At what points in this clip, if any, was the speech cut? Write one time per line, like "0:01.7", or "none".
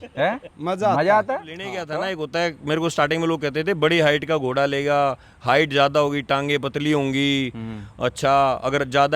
0:01.9